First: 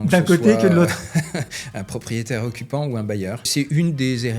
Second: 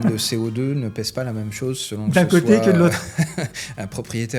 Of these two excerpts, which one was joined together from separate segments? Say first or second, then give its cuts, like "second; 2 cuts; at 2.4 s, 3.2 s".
first; 1 cut; at 3.5 s